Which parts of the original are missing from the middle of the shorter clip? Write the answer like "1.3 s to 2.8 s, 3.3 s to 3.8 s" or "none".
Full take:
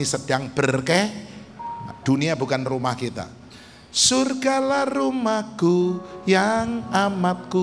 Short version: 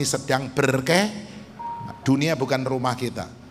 none